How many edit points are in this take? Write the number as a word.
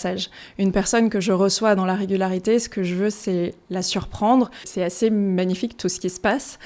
one